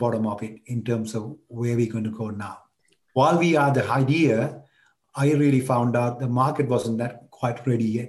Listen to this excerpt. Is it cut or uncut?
cut